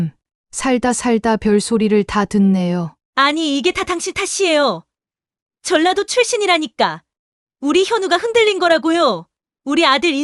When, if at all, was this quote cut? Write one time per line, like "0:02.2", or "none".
0:03.0